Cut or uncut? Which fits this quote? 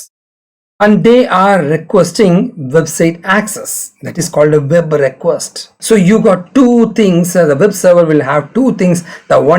cut